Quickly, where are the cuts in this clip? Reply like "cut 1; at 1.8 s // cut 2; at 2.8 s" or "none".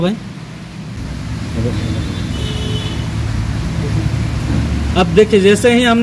cut 1; at 1.0 s